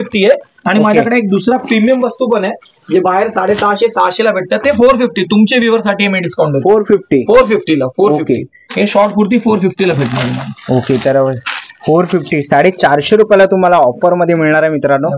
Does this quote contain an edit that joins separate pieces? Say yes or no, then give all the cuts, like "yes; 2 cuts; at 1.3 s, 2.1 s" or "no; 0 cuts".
no; 0 cuts